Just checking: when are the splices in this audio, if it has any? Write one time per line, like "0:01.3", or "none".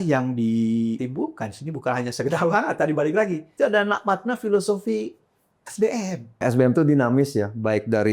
0:01.0
0:03.4
0:06.4